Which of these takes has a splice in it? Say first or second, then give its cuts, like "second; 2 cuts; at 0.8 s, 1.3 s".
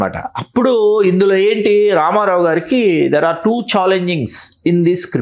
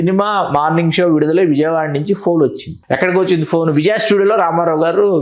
second; 1 cut; at 2.7 s